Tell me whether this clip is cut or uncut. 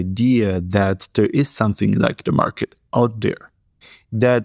uncut